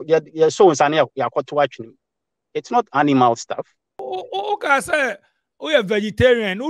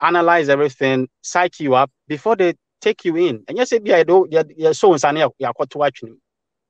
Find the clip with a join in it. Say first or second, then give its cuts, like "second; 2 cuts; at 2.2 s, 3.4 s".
first; 1 cut; at 4.0 s